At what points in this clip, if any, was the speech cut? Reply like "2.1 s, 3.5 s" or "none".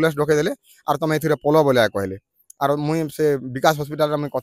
none